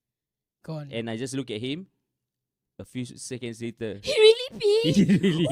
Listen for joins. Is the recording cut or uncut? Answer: uncut